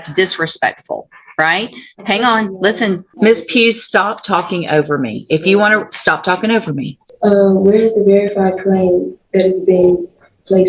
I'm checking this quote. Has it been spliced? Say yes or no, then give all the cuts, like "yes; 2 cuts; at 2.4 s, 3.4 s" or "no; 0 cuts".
yes; 2 cuts; at 3.1 s, 7.0 s